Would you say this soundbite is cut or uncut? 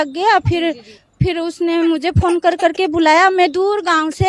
uncut